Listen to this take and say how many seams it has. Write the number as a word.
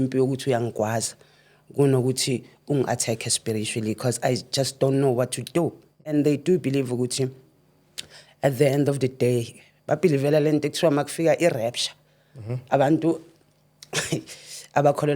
one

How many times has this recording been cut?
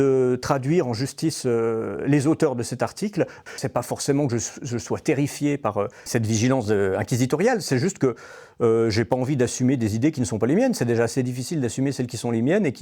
two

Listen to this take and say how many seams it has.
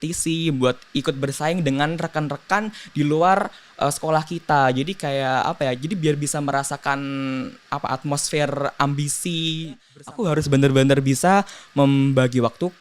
one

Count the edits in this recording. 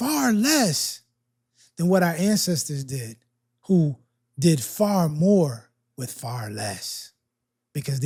zero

